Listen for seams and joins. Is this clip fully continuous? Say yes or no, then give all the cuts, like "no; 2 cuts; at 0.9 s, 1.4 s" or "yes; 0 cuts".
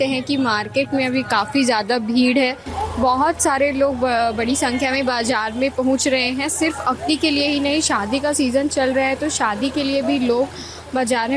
yes; 0 cuts